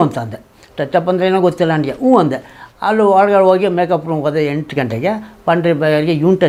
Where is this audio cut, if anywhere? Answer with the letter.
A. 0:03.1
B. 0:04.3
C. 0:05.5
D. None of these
D